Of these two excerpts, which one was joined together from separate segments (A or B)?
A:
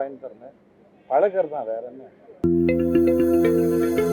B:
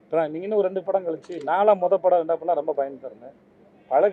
A